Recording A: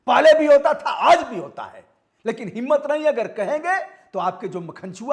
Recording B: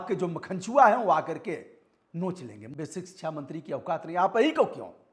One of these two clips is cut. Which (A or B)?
B